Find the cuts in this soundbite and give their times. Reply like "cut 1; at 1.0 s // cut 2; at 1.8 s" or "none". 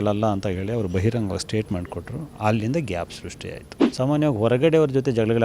cut 1; at 3.8 s